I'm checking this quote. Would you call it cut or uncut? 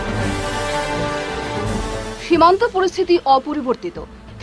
cut